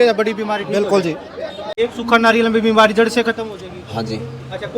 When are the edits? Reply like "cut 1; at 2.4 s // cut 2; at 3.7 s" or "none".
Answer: cut 1; at 1.7 s